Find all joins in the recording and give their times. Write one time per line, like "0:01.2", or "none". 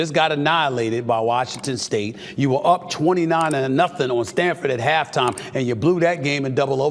none